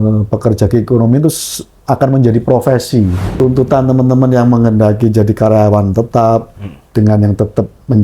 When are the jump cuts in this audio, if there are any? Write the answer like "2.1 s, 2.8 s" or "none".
3.2 s